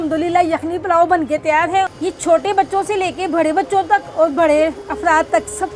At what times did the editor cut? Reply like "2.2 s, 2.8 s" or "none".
1.9 s